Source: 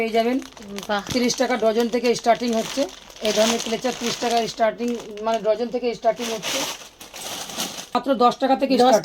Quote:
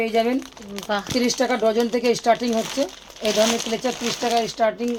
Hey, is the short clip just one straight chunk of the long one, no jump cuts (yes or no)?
yes